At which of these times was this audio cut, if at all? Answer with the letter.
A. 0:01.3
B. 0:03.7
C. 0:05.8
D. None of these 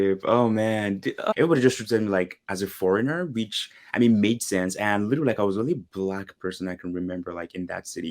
A